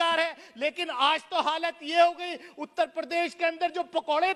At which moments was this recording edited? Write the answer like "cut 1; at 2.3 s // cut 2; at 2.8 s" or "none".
none